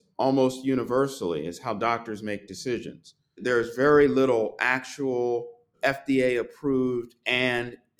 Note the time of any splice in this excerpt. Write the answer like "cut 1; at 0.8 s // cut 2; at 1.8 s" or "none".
cut 1; at 3.4 s // cut 2; at 5.7 s